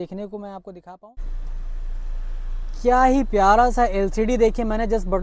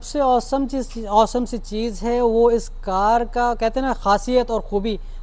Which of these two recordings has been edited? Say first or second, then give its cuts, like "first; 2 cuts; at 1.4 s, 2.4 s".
first; 1 cut; at 0.9 s